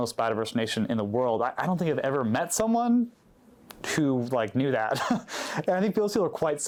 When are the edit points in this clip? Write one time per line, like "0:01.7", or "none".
none